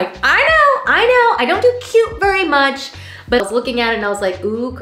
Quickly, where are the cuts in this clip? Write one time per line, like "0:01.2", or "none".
0:03.4